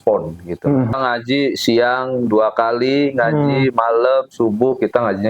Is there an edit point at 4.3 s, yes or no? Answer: no